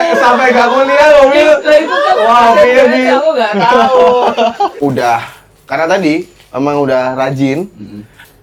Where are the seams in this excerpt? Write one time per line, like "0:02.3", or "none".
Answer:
0:04.7